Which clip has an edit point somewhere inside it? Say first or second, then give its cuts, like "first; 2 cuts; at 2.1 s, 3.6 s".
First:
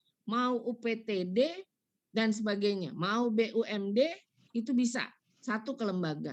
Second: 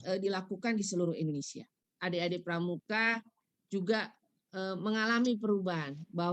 second; 1 cut; at 1.8 s